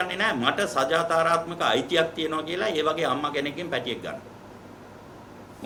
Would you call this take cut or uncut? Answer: uncut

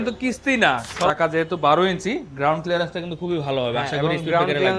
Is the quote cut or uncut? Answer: cut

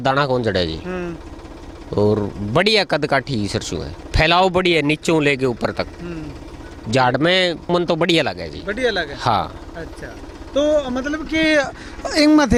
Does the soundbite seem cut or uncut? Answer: uncut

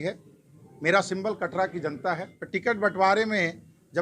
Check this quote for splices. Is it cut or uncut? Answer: cut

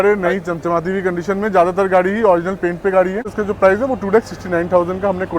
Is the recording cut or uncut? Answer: cut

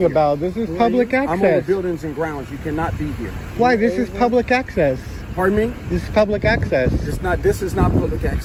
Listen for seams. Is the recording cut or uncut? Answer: uncut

